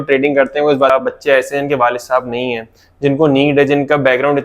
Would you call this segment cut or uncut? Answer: cut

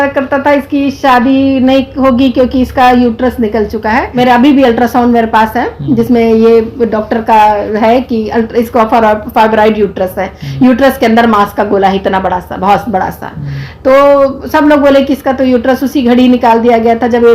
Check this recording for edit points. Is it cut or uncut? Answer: cut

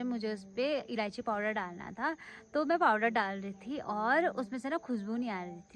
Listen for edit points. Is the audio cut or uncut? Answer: uncut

